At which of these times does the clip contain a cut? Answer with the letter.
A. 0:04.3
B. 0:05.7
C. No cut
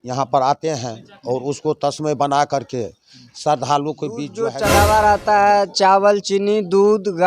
A